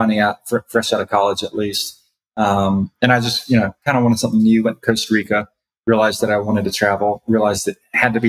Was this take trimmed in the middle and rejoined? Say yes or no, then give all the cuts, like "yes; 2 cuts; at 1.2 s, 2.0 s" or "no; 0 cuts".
no; 0 cuts